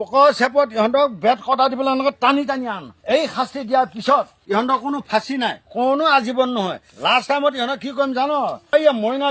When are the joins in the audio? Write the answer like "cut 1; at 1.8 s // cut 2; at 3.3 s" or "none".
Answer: none